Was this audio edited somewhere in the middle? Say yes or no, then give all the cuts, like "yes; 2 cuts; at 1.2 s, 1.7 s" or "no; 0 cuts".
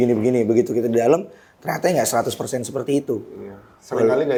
no; 0 cuts